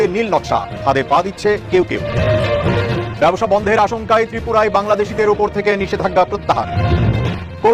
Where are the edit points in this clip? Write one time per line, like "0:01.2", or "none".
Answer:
none